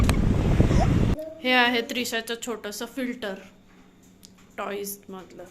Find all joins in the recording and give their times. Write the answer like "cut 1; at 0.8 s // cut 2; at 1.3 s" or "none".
cut 1; at 1.1 s